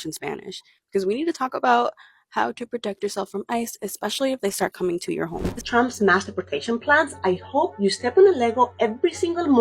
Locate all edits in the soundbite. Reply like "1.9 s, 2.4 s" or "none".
5.6 s